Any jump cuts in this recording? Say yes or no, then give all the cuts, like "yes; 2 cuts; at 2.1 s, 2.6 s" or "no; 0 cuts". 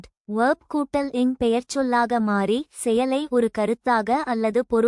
no; 0 cuts